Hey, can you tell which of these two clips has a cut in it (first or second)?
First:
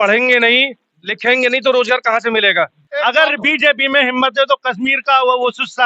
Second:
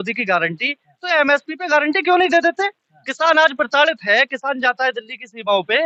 first